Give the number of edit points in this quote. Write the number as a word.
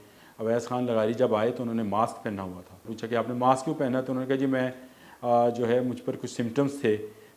one